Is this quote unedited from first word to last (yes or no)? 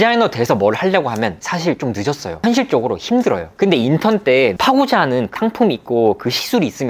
yes